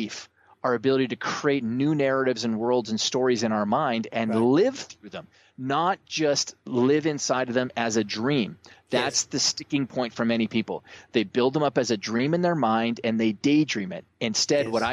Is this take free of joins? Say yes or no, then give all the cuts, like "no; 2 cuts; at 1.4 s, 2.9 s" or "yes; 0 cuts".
yes; 0 cuts